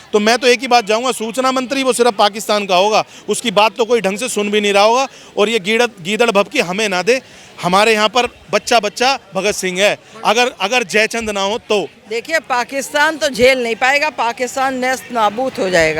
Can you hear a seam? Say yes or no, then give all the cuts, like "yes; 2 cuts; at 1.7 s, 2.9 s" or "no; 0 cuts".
yes; 1 cut; at 12.0 s